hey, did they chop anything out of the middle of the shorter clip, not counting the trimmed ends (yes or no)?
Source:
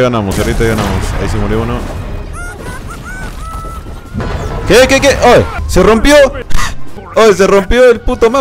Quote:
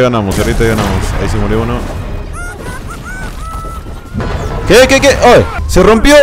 no